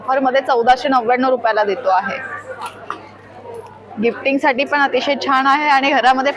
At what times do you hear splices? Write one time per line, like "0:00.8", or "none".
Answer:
none